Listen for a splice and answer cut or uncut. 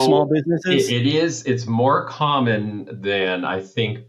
uncut